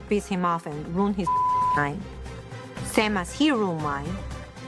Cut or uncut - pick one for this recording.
uncut